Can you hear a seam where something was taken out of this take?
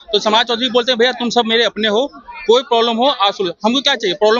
no; 0 cuts

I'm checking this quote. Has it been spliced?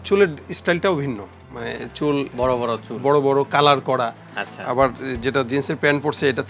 no; 0 cuts

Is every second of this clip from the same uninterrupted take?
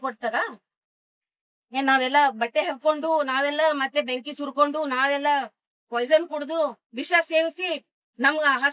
yes; 0 cuts

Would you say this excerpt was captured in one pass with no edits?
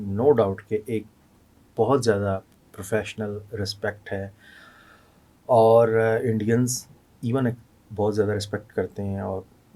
yes; 0 cuts

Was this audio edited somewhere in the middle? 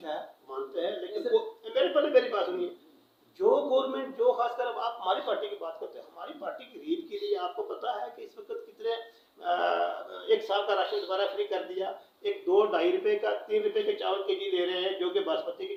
no; 0 cuts

